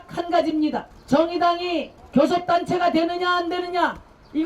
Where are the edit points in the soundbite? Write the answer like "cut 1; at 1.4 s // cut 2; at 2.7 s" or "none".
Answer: cut 1; at 0.9 s // cut 2; at 2.0 s